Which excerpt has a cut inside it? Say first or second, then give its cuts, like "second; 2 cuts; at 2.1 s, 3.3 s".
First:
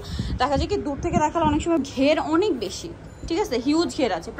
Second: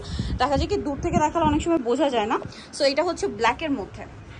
first; 1 cut; at 1.8 s